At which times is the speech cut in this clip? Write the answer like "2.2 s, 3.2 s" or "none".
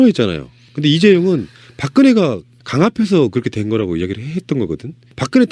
none